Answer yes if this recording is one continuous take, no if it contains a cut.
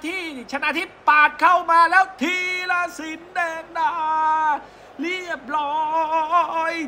yes